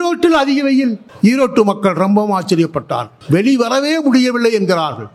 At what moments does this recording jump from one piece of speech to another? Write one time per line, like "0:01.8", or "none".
0:01.1
0:03.1